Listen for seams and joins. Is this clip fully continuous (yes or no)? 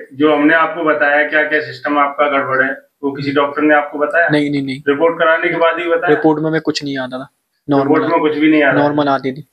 yes